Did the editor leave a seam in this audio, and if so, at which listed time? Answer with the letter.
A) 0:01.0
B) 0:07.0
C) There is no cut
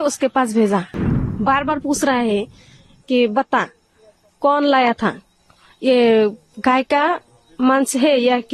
A